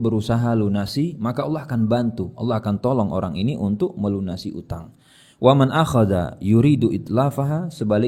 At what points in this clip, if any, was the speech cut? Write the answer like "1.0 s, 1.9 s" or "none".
none